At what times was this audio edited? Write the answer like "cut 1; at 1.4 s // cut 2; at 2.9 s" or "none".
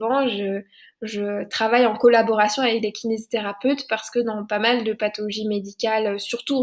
none